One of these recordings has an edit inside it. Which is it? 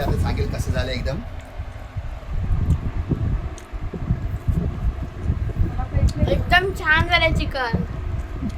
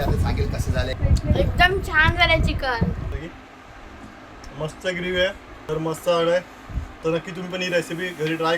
second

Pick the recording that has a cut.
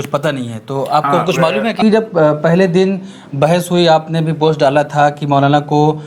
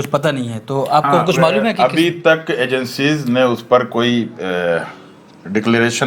first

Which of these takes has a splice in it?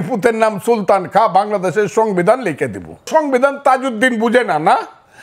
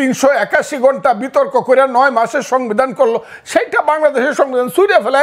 first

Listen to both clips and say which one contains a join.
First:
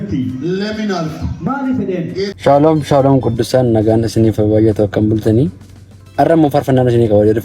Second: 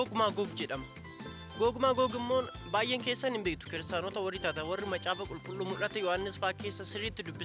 first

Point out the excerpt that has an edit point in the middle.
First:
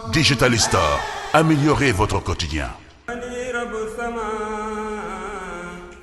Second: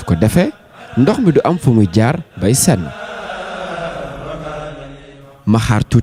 first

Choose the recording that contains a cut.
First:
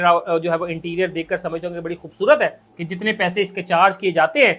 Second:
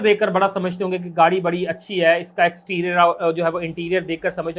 first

